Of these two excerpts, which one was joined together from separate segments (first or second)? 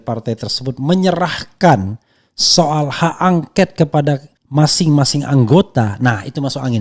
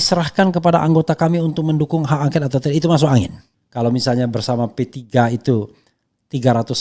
second